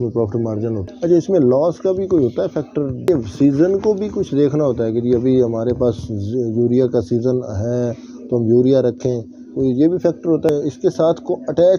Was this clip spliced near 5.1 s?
no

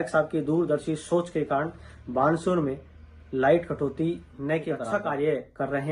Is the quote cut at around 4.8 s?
yes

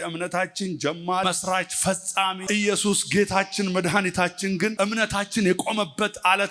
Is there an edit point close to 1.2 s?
yes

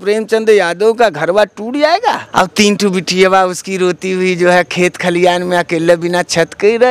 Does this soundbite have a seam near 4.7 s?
no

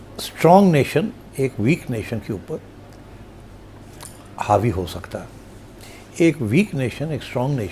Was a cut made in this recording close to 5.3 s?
no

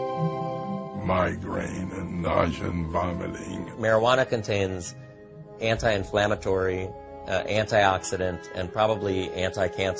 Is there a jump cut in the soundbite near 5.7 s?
no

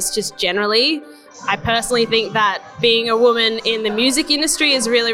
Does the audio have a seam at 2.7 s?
no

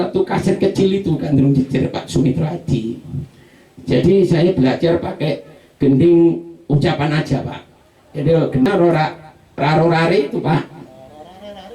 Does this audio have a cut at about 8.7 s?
yes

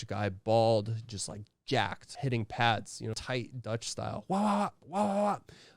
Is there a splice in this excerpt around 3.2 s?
yes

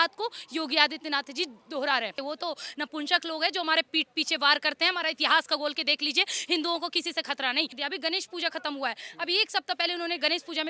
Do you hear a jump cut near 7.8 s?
yes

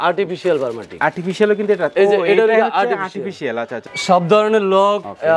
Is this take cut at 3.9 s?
yes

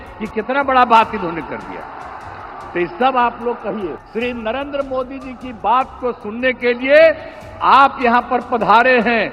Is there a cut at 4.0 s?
yes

